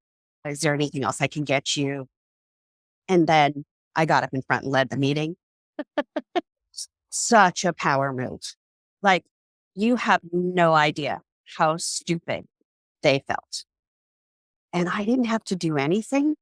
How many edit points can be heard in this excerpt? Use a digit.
0